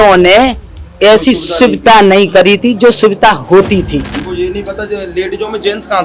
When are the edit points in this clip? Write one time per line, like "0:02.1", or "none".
0:04.2